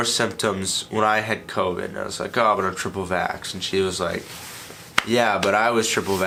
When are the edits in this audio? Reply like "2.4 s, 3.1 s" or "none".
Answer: none